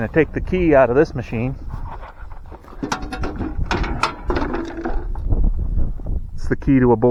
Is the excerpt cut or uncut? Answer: uncut